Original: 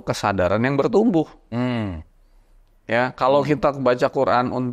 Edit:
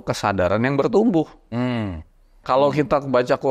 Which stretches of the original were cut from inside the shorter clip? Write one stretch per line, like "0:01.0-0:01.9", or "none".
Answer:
0:02.4-0:03.1

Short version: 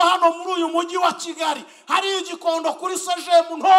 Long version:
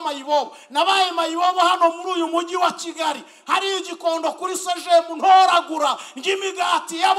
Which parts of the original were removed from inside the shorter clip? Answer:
none

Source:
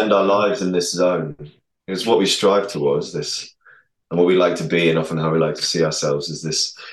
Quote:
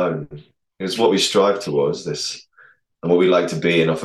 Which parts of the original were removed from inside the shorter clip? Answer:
none

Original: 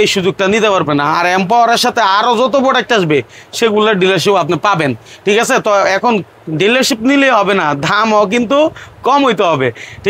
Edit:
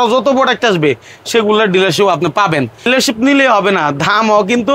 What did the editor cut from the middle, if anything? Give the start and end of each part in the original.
0:05.1-0:06.7

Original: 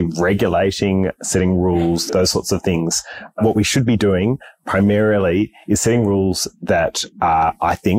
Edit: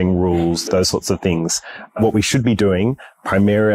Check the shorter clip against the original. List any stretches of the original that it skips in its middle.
none

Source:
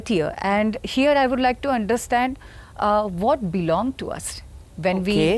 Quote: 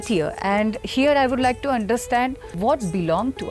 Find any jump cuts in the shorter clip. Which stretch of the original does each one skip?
0:02.5-0:03.1

